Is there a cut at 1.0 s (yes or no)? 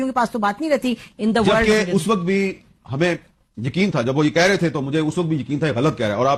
no